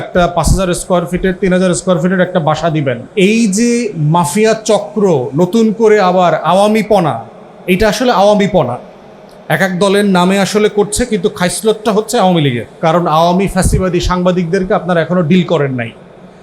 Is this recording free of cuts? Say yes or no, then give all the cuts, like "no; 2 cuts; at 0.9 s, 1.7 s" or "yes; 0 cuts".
no; 2 cuts; at 3.0 s, 12.7 s